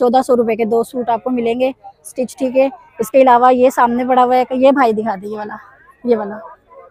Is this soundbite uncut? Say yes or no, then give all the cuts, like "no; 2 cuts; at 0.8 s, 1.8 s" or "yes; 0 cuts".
yes; 0 cuts